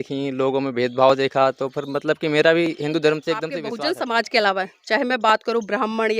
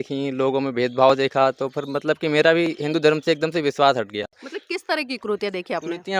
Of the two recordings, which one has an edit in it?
first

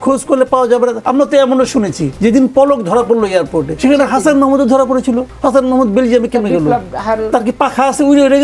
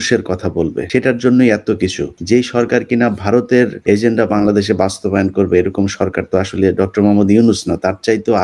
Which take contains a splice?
first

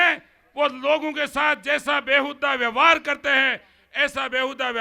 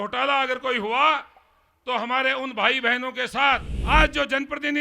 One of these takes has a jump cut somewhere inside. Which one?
second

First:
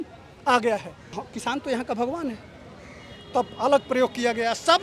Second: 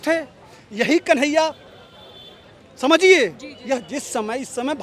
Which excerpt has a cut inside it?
first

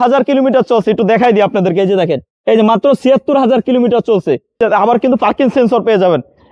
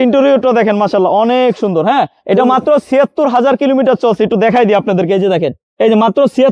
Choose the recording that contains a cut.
first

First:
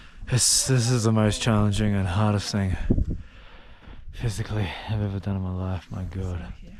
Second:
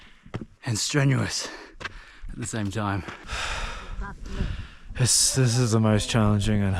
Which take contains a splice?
second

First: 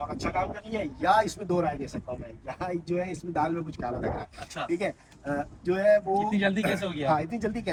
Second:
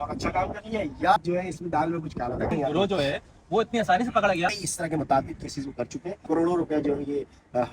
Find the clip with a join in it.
second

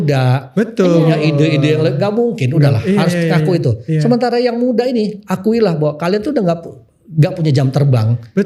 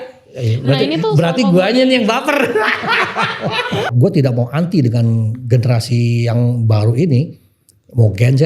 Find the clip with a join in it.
second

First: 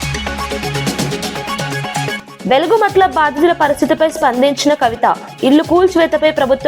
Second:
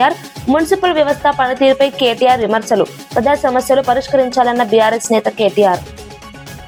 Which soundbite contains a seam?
first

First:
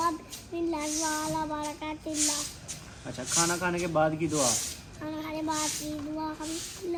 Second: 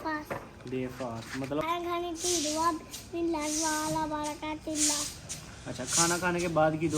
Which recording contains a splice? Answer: second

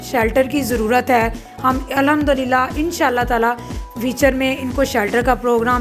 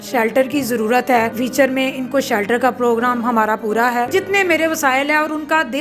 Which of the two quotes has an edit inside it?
second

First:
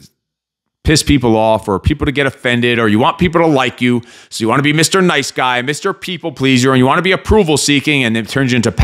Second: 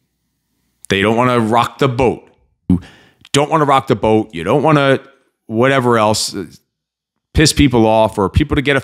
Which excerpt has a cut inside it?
second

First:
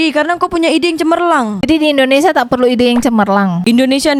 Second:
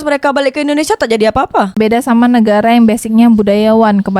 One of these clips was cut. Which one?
second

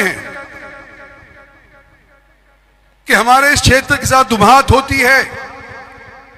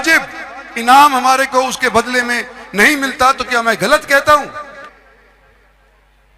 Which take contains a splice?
second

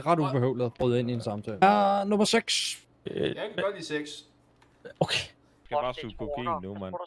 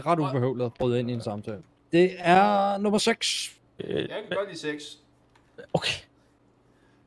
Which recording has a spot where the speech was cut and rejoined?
first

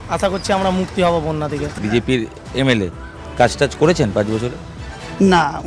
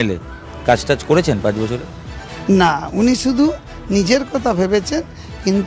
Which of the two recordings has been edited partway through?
first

